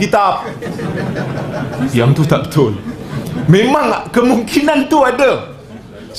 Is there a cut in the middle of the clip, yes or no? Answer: no